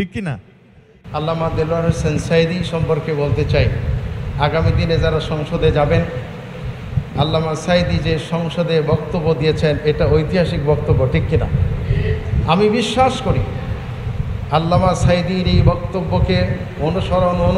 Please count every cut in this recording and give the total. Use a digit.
1